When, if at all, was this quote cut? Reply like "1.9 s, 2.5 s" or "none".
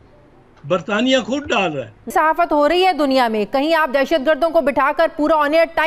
2.1 s